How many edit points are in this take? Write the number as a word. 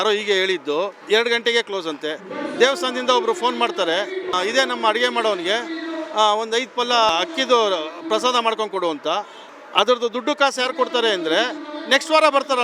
three